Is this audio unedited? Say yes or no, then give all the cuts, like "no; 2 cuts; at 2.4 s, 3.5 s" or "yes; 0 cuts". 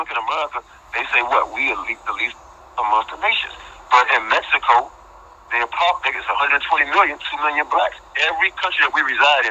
no; 1 cut; at 3.1 s